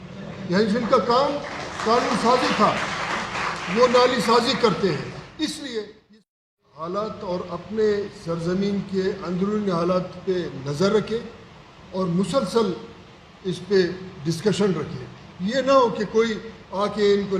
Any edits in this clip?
yes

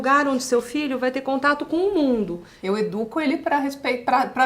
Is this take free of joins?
no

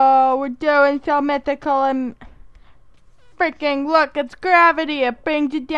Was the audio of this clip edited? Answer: no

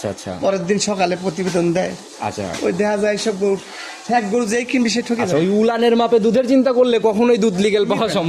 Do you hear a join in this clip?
no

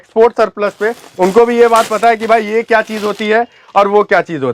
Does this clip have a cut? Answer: no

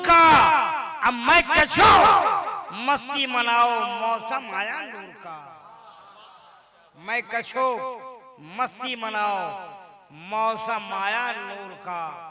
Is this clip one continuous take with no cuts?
yes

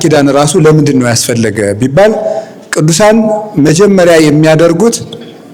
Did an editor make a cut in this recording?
no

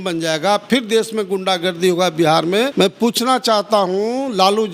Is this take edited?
yes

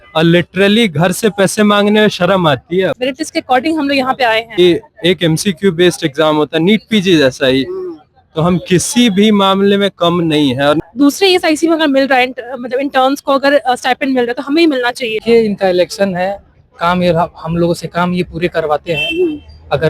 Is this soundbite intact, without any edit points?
no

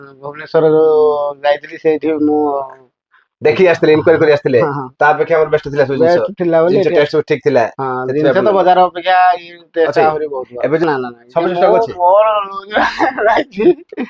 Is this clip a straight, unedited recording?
no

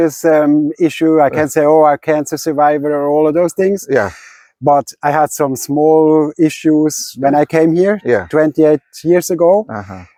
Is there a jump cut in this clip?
no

